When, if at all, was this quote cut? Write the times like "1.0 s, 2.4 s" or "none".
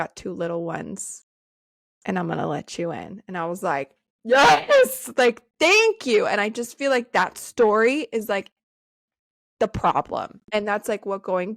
10.4 s